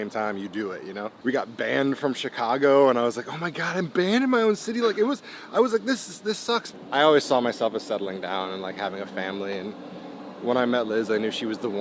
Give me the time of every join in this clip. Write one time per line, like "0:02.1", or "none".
0:01.1
0:06.8